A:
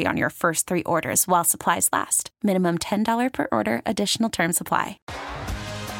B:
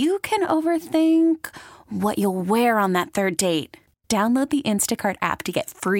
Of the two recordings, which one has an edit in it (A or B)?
A